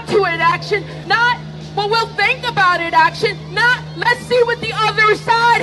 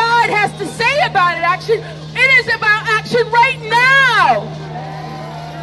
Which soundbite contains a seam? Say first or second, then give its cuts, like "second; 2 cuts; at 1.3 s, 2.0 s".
first; 1 cut; at 0.9 s